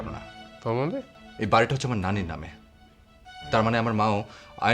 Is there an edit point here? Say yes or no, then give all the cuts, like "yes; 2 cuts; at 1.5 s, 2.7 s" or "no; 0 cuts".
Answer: yes; 1 cut; at 1.2 s